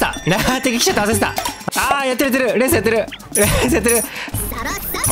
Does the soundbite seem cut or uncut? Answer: cut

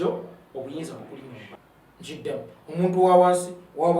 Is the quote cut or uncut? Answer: cut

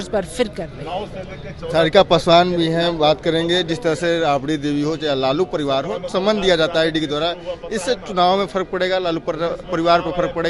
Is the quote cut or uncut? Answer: uncut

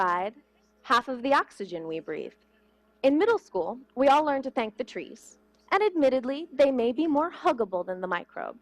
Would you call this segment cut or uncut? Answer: cut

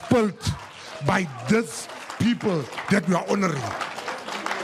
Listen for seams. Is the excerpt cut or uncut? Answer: uncut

